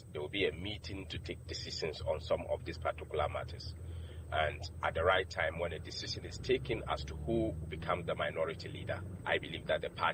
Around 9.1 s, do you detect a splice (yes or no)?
yes